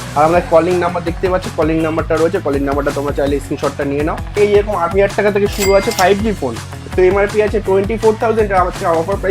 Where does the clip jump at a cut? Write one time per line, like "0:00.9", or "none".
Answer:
0:04.4
0:06.7

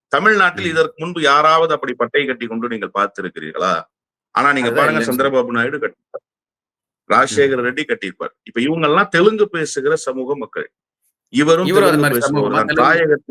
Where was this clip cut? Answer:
none

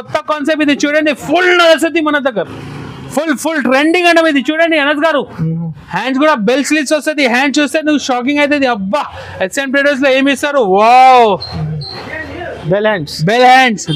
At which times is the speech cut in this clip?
none

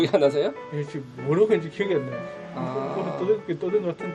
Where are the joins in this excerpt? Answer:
none

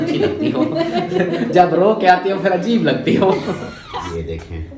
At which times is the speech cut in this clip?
0:03.7

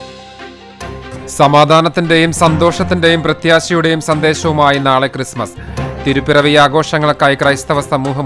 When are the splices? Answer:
0:01.2

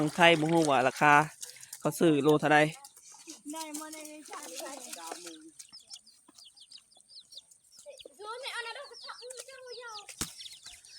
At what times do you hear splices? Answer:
0:04.4
0:10.1

